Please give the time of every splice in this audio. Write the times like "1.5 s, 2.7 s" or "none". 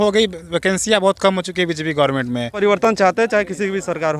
2.8 s